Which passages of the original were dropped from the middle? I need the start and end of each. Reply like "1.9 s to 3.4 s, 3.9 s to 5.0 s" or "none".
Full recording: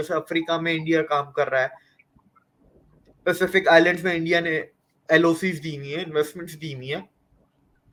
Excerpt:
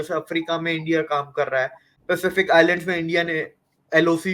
1.9 s to 3.0 s